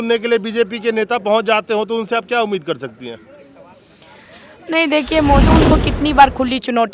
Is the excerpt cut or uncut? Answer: cut